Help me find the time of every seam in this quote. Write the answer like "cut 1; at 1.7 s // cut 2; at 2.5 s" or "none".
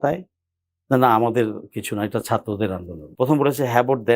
cut 1; at 3.0 s